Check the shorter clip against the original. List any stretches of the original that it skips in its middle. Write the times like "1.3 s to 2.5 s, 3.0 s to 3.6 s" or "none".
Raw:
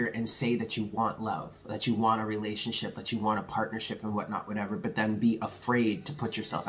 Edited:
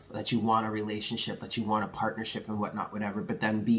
none